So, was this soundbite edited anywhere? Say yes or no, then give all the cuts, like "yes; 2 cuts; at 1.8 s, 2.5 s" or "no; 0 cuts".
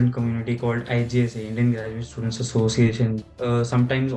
yes; 1 cut; at 3.2 s